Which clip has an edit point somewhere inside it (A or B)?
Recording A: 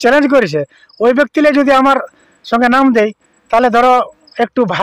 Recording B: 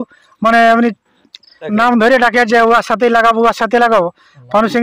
B